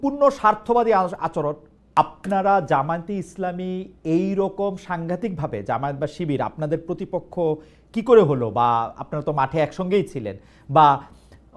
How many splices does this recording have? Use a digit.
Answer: 1